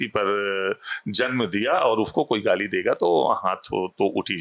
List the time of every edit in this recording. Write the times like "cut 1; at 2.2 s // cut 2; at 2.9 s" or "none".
none